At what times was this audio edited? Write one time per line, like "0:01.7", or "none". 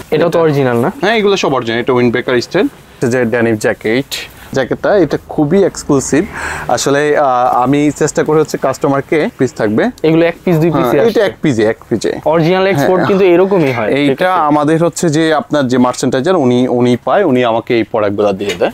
0:03.0
0:04.5
0:09.3